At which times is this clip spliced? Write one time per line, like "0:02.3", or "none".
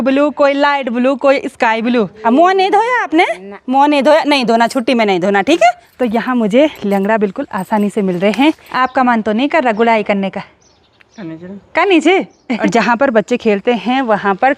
0:02.1
0:05.9
0:08.7
0:12.6